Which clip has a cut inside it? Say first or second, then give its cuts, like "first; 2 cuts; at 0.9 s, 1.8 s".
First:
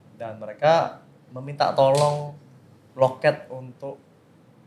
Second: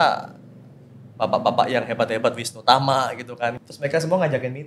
second; 1 cut; at 3.6 s